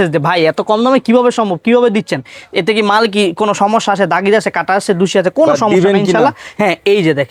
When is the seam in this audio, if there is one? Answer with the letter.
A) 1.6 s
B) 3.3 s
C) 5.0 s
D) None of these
D